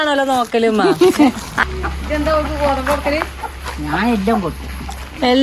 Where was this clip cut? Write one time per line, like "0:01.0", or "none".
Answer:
0:01.5